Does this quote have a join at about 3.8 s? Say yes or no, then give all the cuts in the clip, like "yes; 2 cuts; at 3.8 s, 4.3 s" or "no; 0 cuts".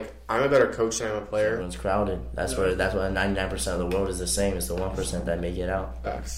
no; 1 cut; at 1.7 s